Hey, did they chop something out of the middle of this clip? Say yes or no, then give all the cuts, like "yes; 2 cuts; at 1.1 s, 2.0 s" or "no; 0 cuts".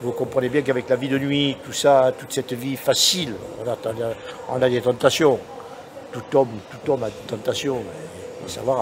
no; 0 cuts